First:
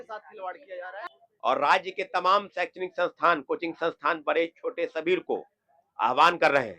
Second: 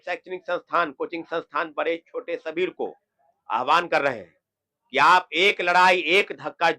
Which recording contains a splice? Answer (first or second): first